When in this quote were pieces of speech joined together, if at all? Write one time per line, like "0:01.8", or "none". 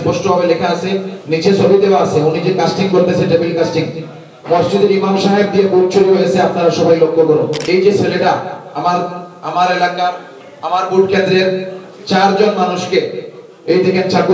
0:07.6